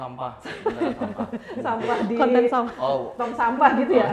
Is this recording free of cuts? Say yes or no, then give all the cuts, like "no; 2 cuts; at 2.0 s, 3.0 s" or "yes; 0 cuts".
yes; 0 cuts